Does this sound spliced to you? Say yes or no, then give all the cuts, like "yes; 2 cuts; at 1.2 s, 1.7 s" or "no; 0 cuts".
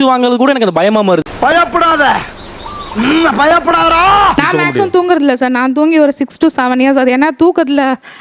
yes; 2 cuts; at 4.3 s, 7.2 s